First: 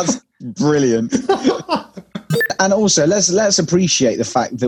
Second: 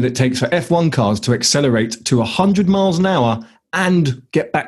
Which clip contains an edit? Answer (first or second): first